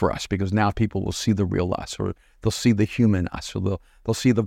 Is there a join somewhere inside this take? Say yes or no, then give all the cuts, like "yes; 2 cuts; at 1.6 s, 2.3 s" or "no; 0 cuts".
no; 0 cuts